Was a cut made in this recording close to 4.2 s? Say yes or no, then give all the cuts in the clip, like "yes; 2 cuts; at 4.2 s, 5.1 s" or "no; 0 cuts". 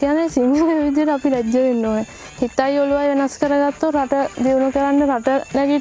no; 1 cut; at 2.2 s